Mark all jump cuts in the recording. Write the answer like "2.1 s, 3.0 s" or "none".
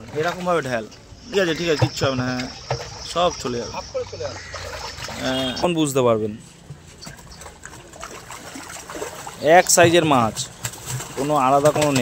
1.3 s, 5.6 s